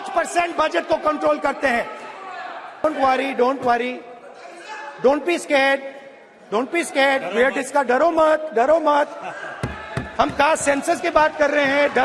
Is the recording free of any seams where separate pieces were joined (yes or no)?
no